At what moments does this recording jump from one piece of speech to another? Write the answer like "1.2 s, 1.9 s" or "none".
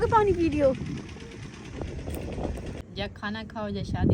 2.8 s

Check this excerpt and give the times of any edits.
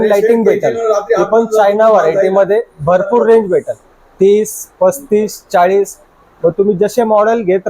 none

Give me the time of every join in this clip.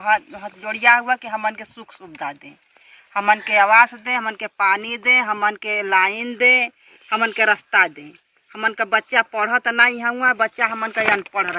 none

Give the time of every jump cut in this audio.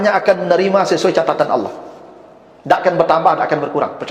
none

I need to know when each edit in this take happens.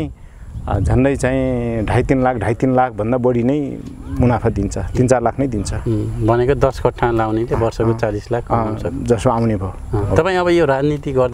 none

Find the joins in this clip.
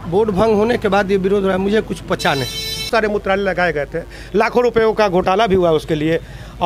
2.9 s

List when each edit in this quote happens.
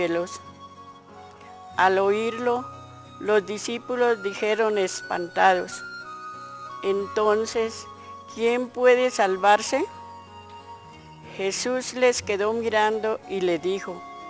11.8 s

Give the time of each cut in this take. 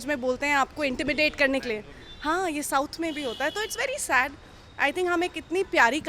none

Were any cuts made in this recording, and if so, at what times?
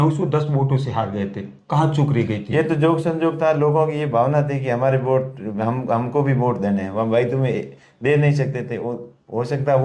none

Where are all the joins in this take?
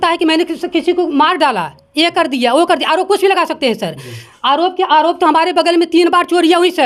none

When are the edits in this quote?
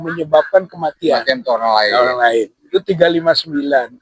none

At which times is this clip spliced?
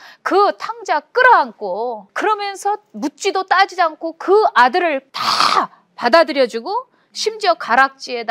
2.1 s, 5.2 s

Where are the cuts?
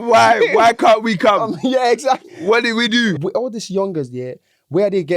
3.2 s

